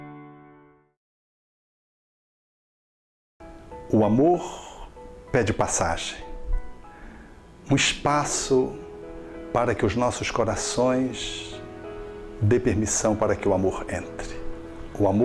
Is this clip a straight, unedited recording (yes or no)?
yes